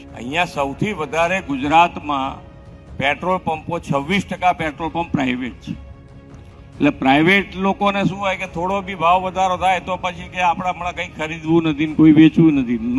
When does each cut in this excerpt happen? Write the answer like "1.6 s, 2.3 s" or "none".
none